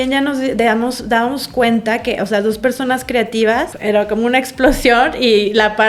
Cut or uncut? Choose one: uncut